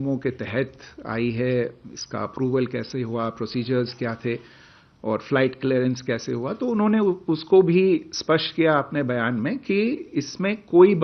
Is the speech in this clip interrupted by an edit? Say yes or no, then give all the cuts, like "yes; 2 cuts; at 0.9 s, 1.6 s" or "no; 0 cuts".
no; 0 cuts